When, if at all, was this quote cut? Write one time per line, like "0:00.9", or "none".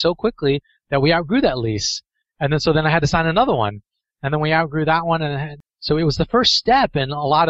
0:05.6